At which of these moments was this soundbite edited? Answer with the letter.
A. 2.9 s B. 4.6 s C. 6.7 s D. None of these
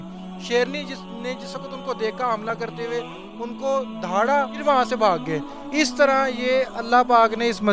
B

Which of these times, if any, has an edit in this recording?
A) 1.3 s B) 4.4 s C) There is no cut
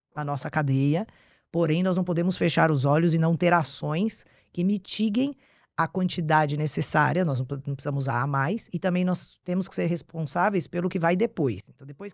C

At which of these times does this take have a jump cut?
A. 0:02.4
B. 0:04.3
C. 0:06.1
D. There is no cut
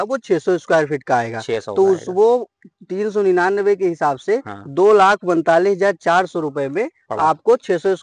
D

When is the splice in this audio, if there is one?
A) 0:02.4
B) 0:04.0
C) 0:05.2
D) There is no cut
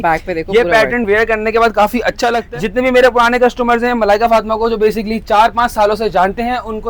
A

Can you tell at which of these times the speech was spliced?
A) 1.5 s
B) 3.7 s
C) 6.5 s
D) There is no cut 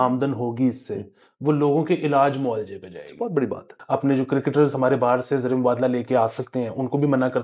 B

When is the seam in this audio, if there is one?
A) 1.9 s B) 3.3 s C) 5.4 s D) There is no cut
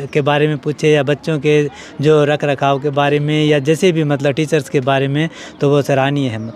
D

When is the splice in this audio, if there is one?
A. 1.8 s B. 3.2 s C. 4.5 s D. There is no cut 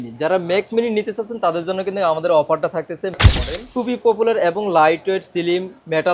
B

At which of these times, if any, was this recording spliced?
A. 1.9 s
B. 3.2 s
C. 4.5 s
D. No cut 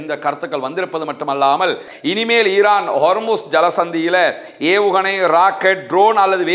A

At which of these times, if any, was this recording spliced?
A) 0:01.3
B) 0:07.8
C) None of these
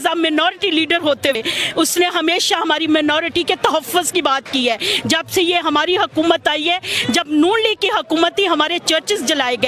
A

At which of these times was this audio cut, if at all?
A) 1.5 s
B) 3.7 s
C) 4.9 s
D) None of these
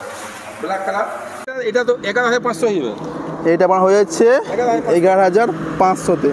A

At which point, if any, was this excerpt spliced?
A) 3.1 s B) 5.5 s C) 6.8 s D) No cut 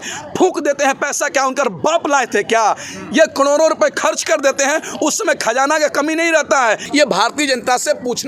C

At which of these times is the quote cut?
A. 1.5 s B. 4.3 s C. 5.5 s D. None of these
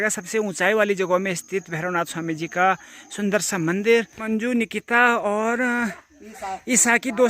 B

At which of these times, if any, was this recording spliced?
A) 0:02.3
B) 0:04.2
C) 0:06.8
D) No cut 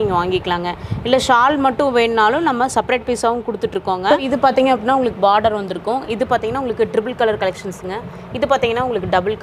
B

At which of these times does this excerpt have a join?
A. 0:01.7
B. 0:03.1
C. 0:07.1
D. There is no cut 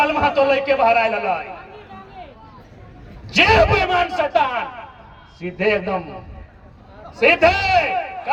D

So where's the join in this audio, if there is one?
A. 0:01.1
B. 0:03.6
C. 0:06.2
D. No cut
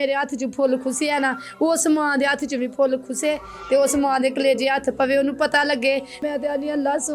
C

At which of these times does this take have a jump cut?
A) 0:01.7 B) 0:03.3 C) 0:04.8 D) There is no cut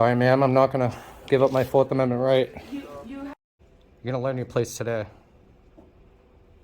B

